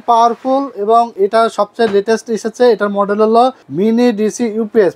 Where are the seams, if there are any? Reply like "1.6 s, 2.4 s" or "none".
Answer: 1.1 s, 3.6 s